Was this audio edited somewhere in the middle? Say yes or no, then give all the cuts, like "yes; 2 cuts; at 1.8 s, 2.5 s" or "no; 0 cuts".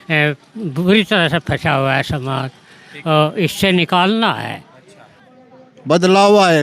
yes; 1 cut; at 5.3 s